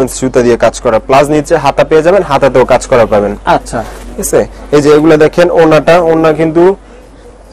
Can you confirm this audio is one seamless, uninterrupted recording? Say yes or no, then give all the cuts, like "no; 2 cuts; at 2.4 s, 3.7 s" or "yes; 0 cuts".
yes; 0 cuts